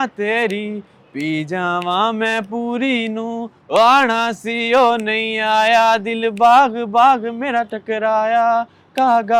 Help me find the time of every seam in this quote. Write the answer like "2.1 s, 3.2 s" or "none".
none